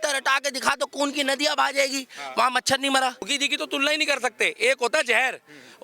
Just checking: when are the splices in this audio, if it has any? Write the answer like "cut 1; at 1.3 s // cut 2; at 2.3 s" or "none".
cut 1; at 3.4 s